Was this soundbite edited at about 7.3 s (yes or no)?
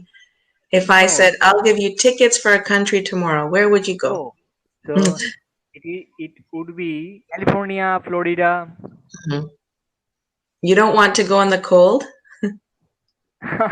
yes